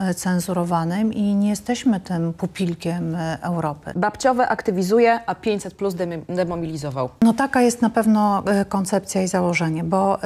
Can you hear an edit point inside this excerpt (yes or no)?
yes